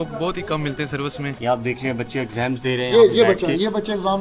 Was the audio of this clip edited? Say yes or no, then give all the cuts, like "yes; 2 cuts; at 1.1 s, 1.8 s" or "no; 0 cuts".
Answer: yes; 1 cut; at 1.3 s